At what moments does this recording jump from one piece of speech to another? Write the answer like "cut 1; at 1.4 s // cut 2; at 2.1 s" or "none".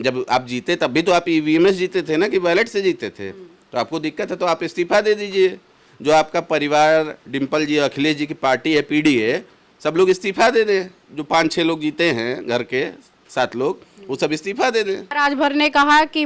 cut 1; at 15.1 s